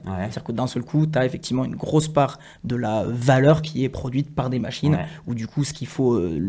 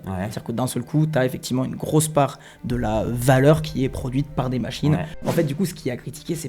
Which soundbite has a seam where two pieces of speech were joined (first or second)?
second